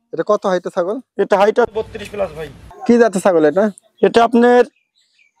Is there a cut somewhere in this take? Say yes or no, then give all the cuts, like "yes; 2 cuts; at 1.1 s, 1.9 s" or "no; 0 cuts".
yes; 1 cut; at 2.6 s